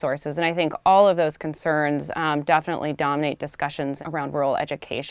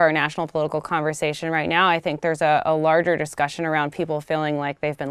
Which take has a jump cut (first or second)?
first